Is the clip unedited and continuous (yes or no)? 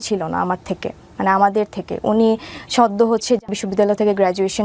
no